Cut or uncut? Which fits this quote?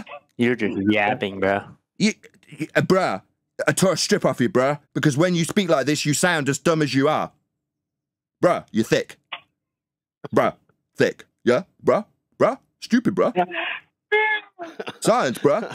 cut